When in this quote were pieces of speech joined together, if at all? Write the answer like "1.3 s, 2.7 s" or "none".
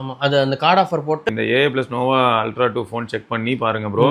1.3 s